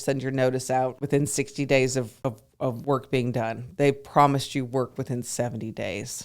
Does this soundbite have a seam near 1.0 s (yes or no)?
yes